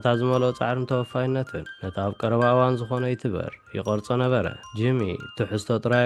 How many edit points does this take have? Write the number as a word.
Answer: one